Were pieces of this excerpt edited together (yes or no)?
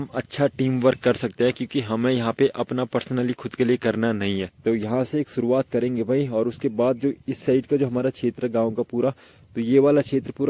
yes